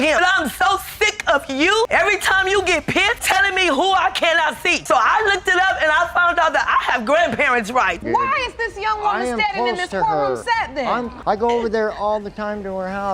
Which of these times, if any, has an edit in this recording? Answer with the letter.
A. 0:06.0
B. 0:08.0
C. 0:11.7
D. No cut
B